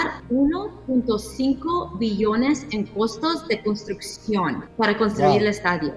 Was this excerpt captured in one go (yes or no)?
yes